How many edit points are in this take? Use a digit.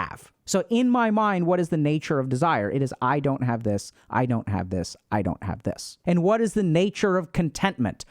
1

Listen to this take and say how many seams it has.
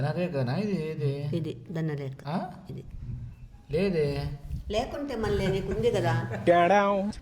1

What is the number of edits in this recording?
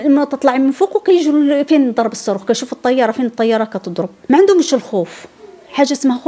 1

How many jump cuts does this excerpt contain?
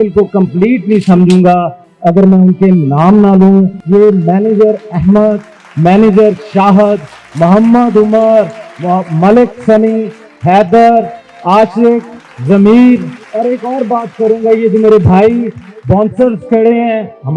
2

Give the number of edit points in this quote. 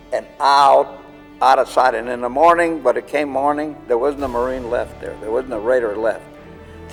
0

